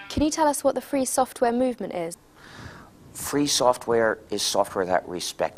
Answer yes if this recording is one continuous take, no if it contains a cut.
yes